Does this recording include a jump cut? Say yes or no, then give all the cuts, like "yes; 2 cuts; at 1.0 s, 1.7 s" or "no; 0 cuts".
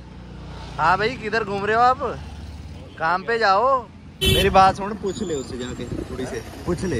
yes; 1 cut; at 4.2 s